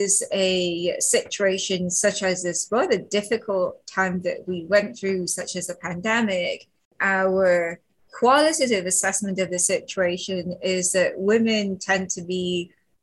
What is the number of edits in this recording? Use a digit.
1